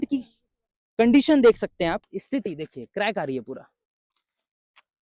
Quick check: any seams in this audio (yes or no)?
yes